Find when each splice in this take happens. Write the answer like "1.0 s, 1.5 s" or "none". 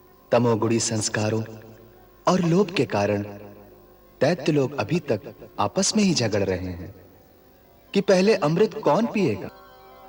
none